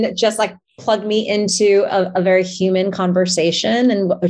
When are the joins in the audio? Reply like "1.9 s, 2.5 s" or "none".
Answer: none